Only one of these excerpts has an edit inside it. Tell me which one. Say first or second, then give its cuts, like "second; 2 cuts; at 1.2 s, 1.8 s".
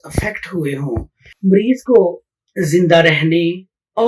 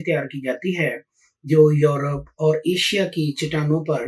first; 1 cut; at 1.2 s